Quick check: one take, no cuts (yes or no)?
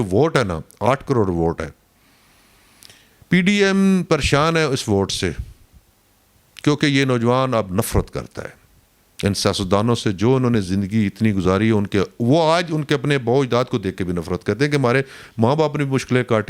yes